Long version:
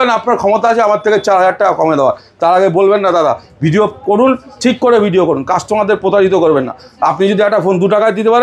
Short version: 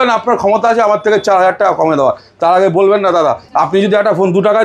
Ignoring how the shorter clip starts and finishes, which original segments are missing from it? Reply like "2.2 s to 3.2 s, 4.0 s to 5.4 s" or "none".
3.4 s to 6.9 s